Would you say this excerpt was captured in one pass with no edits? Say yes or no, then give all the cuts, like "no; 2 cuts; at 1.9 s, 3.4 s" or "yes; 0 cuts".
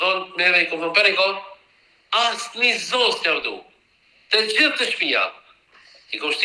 yes; 0 cuts